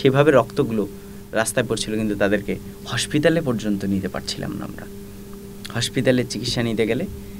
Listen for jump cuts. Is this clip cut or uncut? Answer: uncut